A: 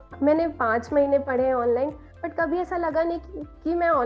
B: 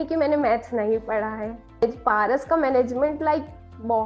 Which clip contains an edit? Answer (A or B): B